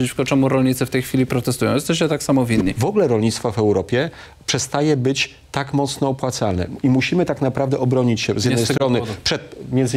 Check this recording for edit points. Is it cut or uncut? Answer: cut